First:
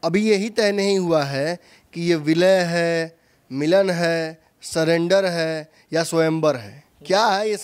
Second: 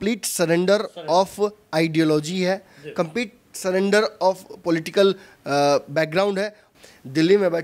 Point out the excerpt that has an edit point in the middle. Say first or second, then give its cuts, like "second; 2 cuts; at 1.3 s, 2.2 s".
second; 1 cut; at 6.6 s